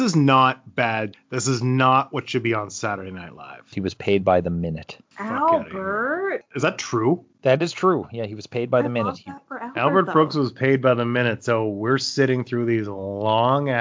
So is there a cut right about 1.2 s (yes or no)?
yes